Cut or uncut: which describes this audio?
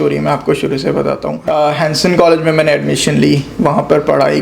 cut